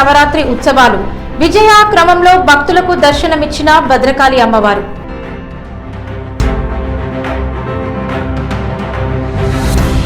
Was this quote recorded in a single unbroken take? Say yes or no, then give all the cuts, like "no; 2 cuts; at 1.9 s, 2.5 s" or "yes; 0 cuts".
no; 1 cut; at 6.3 s